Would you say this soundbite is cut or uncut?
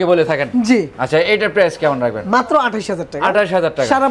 uncut